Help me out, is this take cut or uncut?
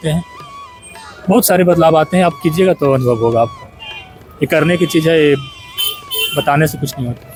uncut